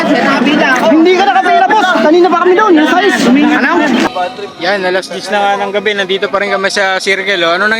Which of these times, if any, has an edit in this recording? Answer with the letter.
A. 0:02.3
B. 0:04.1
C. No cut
B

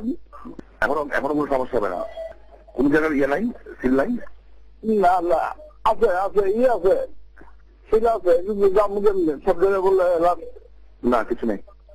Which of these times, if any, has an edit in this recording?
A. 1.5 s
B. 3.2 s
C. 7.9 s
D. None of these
A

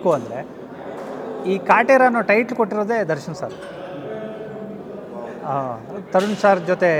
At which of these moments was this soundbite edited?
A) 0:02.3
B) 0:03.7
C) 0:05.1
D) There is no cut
D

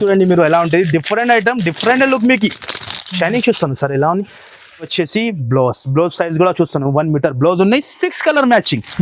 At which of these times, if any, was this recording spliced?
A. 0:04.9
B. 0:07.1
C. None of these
A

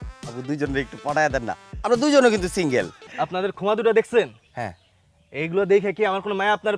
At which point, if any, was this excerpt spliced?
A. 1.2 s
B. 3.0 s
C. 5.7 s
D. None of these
B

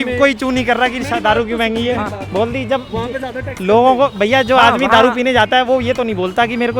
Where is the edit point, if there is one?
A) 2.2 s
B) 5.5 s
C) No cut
A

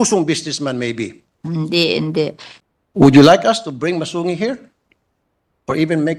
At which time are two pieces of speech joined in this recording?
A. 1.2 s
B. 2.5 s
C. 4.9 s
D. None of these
B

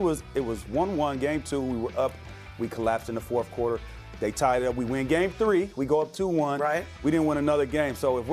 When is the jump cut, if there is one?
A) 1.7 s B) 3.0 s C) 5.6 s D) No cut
D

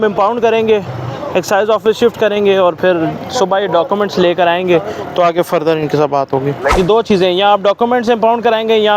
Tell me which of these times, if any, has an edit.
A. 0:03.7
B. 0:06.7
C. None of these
B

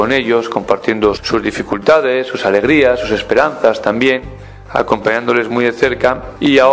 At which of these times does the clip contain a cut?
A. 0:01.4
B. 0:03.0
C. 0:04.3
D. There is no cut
A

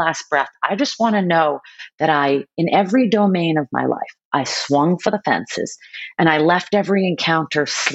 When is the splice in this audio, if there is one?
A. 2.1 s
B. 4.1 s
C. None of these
C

